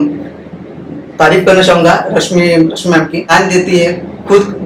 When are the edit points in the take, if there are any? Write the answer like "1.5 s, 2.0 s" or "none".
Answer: 3.2 s